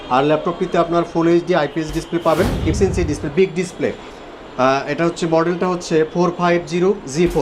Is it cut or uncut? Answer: cut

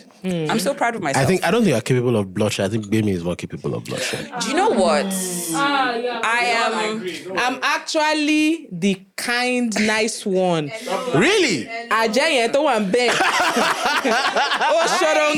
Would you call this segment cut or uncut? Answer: uncut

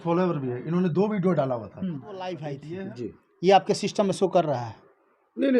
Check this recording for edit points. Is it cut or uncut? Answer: cut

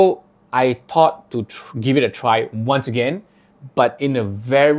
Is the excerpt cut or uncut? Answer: uncut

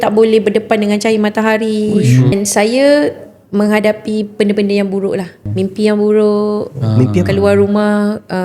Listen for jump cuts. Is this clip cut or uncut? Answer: cut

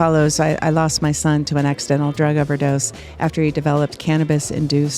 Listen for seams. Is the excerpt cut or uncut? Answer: uncut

